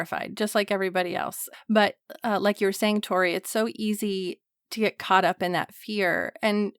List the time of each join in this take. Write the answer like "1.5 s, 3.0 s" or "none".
1.4 s

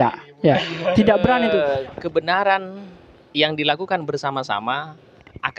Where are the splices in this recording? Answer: 1.7 s

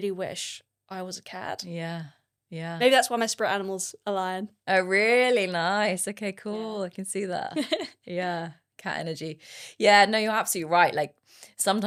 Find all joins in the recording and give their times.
none

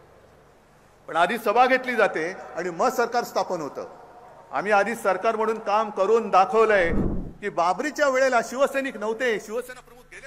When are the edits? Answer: 7.0 s

